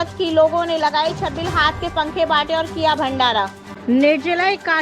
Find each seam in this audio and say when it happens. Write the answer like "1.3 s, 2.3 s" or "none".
3.6 s